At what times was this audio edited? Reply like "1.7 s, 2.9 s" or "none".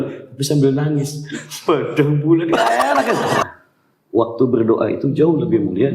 3.5 s